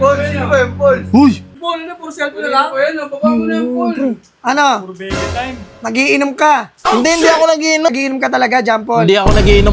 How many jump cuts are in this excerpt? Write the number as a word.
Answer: two